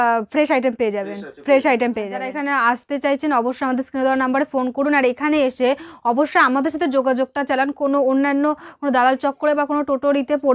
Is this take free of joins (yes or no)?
no